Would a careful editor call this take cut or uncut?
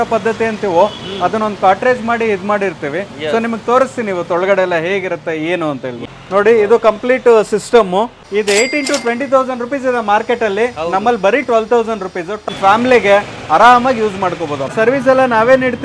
cut